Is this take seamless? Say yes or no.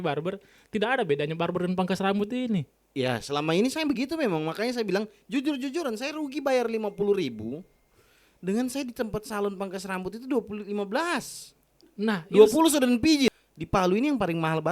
no